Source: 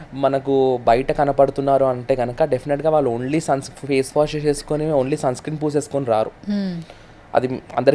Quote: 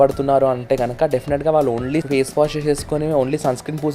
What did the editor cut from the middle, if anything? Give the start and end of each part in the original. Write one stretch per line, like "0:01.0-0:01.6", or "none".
0:03.4-0:03.8